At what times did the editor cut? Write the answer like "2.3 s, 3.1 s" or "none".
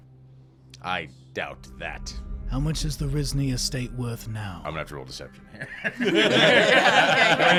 none